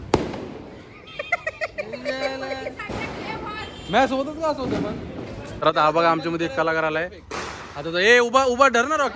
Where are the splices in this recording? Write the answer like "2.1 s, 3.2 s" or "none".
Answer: 5.4 s